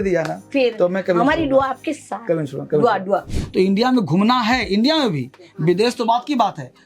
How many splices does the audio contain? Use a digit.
1